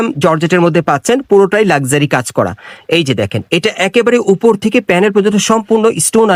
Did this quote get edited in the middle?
no; 0 cuts

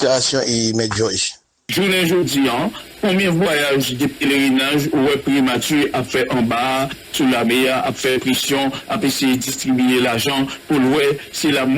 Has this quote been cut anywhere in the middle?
yes; 1 cut; at 1.6 s

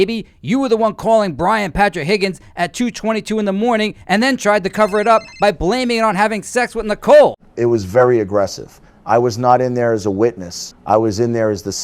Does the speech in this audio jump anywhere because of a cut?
yes; 1 cut; at 7.4 s

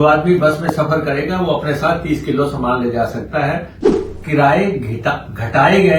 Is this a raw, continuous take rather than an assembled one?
no; 1 cut; at 3.8 s

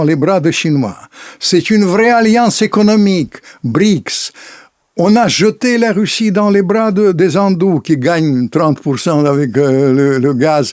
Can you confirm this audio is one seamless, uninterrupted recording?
yes; 0 cuts

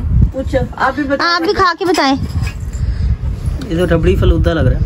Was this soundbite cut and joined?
no; 0 cuts

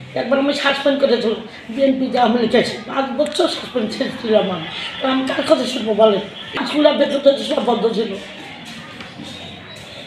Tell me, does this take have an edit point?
yes; 1 cut; at 6.6 s

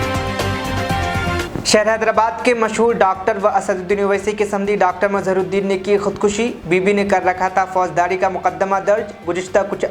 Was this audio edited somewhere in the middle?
yes; 1 cut; at 1.4 s

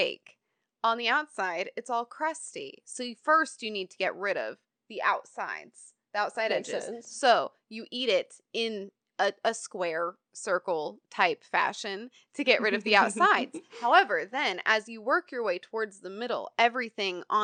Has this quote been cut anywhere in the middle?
no; 0 cuts

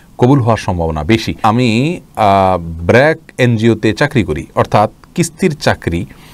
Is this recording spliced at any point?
yes; 1 cut; at 1.3 s

